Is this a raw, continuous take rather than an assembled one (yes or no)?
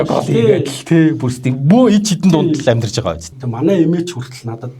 no